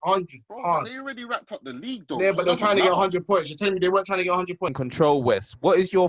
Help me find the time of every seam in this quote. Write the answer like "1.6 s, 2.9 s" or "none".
4.8 s